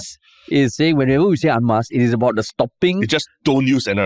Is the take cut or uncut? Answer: uncut